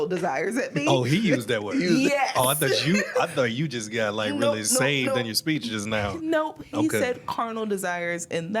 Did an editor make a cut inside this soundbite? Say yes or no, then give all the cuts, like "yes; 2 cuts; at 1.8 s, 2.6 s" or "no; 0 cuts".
no; 0 cuts